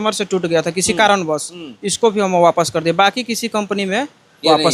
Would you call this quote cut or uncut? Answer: uncut